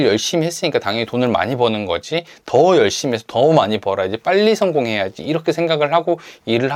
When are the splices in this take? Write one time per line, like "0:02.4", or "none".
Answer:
none